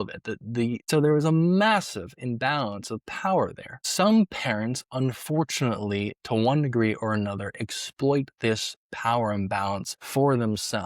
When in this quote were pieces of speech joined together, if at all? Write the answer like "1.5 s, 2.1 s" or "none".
0.9 s, 3.9 s, 9.9 s